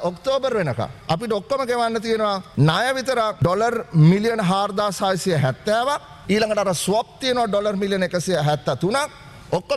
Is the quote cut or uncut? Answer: cut